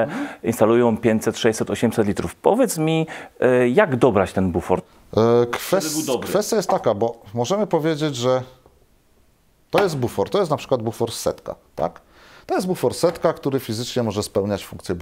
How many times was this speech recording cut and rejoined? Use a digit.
0